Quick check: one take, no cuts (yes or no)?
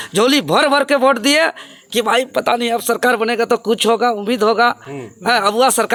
yes